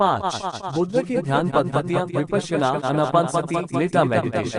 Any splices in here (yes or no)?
no